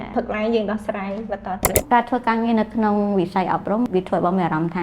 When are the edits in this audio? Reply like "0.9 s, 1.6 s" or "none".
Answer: 1.7 s, 3.9 s